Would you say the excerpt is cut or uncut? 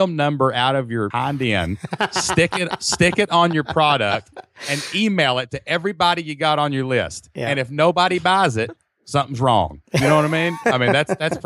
cut